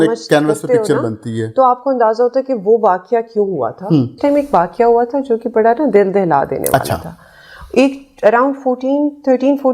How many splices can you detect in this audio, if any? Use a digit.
1